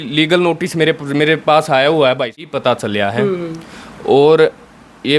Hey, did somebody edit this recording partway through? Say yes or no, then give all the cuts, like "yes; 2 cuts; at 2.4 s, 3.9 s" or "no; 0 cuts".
yes; 1 cut; at 2.4 s